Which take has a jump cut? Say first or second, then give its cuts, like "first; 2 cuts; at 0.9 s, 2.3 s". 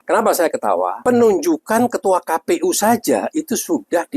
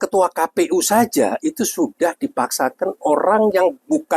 first; 1 cut; at 1.0 s